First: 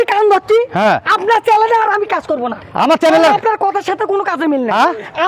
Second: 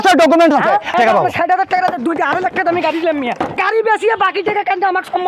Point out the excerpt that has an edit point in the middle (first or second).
second